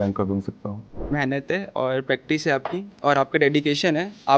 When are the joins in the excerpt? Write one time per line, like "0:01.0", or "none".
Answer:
0:01.0